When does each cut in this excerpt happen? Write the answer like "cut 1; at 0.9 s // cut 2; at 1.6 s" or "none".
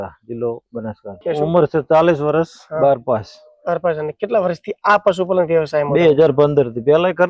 cut 1; at 1.2 s